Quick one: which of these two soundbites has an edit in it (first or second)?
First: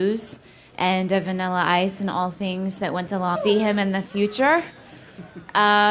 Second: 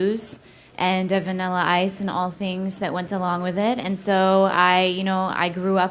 second